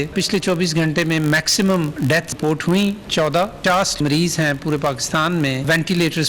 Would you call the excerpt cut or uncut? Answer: cut